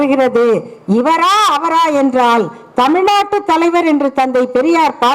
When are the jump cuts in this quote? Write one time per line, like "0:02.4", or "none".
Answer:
none

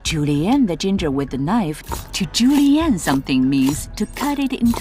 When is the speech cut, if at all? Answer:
0:01.9

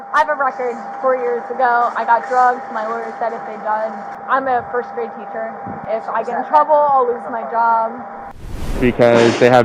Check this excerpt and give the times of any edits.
0:04.1
0:05.8
0:08.7

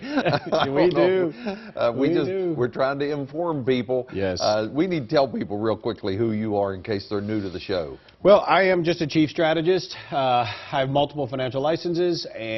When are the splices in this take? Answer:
none

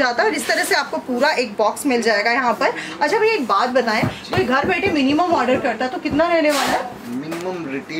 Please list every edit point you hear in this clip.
none

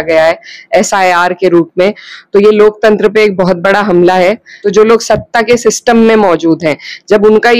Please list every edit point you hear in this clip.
0:04.5

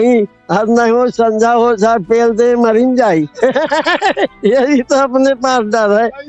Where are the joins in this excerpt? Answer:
none

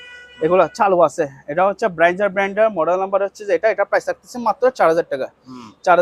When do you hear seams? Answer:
none

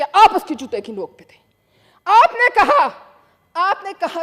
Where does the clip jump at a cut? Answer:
none

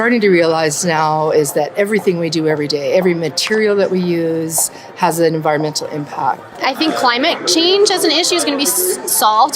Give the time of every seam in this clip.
0:06.6

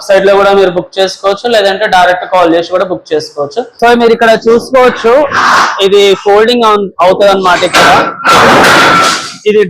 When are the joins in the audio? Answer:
0:03.8

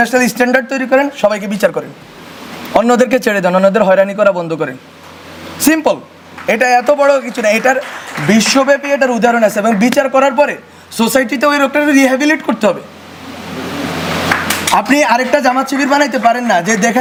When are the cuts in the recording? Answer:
none

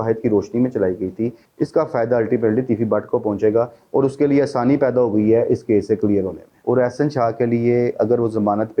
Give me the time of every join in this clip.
0:01.4
0:06.4

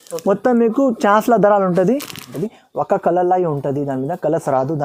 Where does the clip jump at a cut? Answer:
0:02.3

